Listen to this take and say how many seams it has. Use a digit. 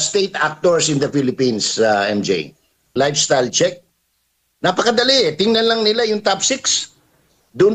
1